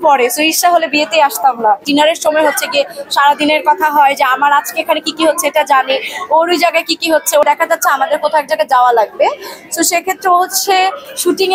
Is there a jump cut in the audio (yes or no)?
yes